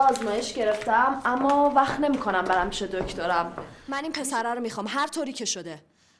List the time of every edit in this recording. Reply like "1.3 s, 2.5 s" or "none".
3.8 s